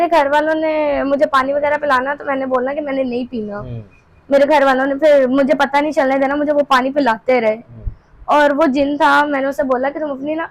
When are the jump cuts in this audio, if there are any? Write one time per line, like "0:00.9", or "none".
none